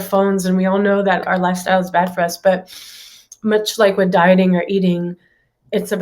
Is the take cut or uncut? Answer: cut